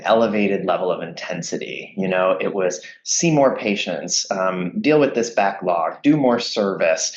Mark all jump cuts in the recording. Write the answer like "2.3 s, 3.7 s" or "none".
none

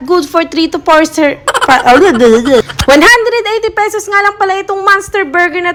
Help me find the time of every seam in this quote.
none

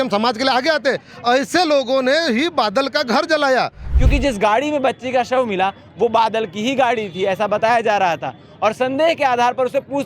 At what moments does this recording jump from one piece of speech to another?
3.9 s

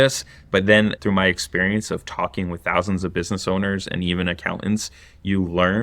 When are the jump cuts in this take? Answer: 1.0 s

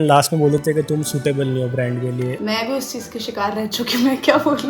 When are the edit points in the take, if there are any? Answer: 2.4 s

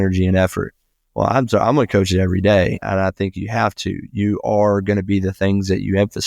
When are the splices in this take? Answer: 2.8 s

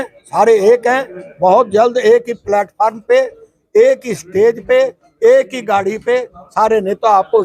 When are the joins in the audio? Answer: none

